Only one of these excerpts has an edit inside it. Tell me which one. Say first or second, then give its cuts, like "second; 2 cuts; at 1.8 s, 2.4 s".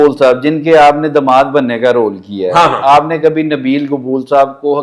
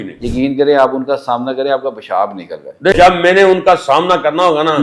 second; 1 cut; at 2.9 s